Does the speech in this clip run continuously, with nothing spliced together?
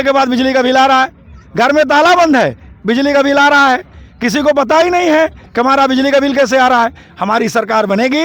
yes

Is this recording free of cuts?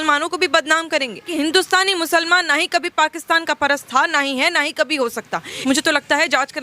no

